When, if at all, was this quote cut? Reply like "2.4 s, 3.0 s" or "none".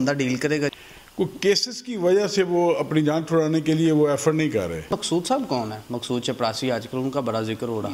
0.7 s, 4.9 s